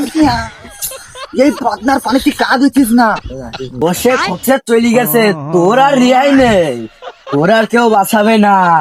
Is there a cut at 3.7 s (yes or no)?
yes